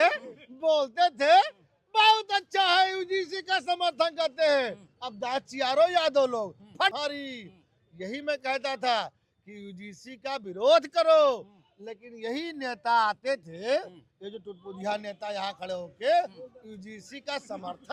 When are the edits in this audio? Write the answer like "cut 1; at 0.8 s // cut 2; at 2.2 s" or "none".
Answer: none